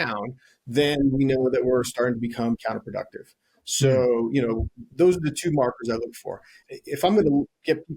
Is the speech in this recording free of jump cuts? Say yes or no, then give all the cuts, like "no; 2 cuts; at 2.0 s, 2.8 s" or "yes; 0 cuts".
no; 1 cut; at 6.6 s